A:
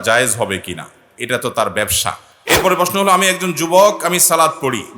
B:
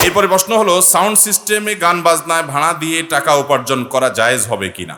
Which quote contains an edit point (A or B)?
A